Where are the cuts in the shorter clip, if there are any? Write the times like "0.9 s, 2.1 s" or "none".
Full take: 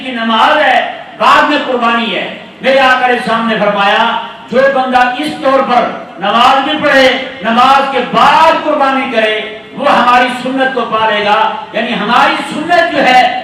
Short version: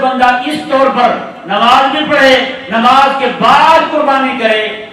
none

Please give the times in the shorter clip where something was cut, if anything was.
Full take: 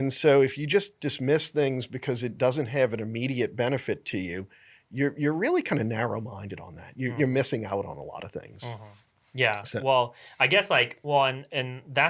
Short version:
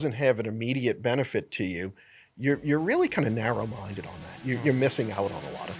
none

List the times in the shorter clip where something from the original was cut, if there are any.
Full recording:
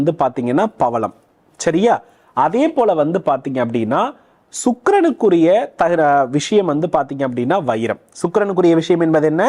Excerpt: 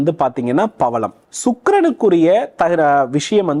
1.2 s

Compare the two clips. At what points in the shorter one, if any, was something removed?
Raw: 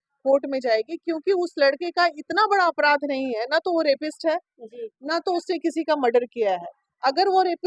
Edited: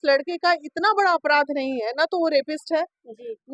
none

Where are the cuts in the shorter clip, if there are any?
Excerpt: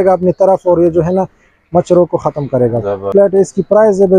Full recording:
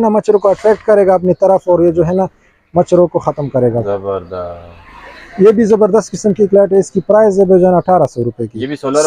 3.1 s

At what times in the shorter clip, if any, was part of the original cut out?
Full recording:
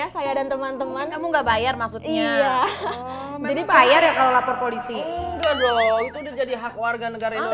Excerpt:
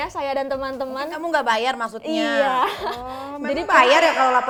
none

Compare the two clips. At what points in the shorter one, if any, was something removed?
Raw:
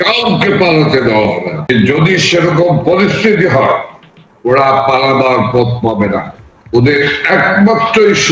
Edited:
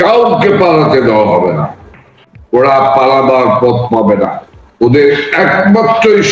1.8 s

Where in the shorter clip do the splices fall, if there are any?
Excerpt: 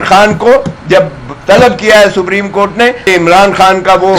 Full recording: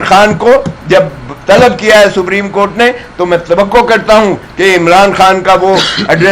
3.1 s

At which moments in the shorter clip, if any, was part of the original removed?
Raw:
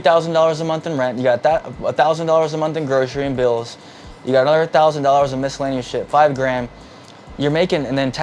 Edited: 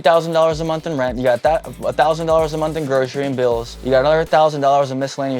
3.7 s

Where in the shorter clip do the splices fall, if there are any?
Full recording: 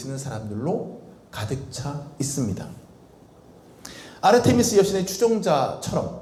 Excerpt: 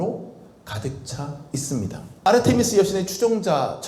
2.3 s

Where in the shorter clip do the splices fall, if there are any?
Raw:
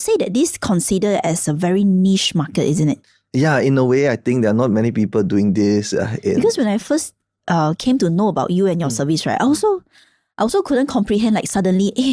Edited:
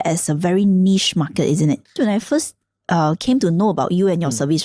2.0 s

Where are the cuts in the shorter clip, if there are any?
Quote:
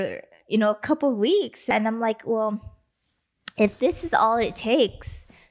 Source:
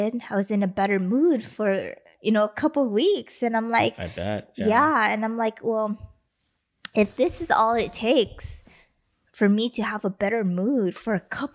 1.7 s

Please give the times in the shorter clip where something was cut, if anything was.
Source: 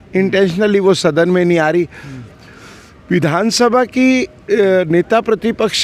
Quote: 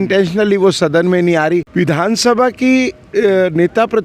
1.7 s

